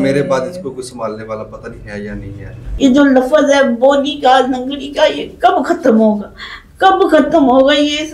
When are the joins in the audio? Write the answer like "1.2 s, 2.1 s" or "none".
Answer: 2.6 s

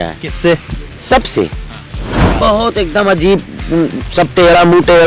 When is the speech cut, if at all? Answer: 2.2 s

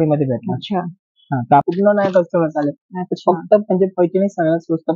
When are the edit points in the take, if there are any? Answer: 1.6 s

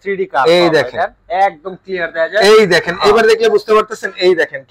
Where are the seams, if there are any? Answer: none

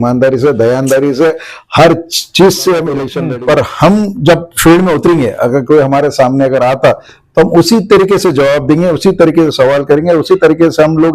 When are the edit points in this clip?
3.1 s

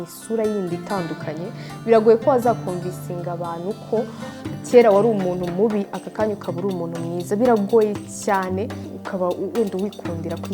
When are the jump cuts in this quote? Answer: 8.9 s

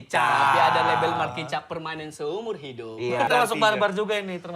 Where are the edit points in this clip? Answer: 3.3 s

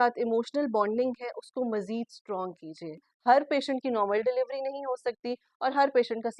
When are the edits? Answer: 3.1 s

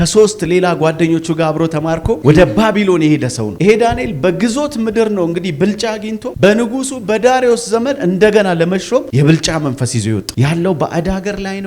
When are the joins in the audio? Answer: 10.3 s

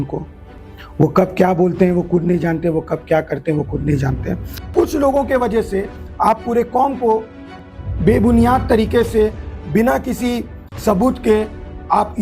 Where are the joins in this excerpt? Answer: 4.5 s

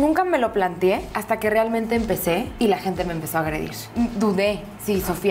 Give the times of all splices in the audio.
1.1 s, 2.5 s, 3.8 s

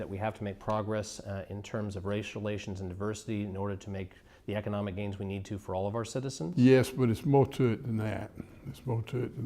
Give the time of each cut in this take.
6.9 s

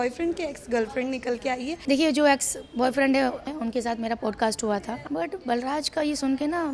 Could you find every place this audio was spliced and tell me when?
1.8 s, 3.5 s, 5.0 s

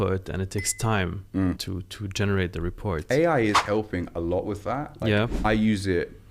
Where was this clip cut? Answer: 1.6 s, 5.4 s

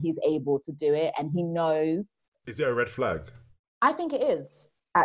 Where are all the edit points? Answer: 2.4 s

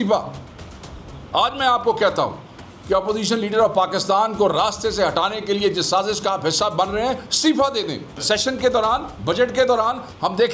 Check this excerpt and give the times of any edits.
8.2 s

